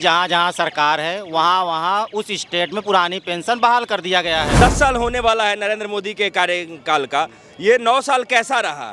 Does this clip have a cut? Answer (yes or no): yes